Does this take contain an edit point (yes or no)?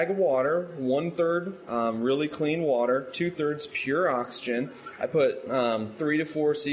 no